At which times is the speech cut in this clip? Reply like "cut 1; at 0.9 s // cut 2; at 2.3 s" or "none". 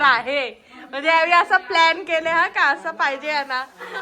none